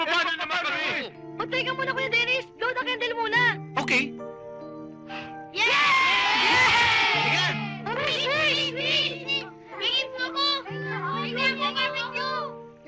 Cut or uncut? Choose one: cut